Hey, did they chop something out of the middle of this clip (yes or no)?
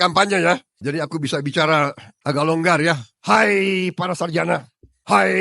yes